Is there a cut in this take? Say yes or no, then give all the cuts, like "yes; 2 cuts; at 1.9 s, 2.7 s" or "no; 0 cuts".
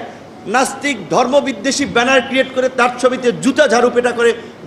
no; 0 cuts